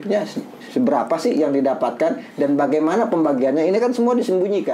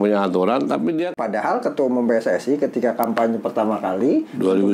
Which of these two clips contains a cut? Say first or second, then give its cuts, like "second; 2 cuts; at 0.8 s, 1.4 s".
second; 1 cut; at 1.1 s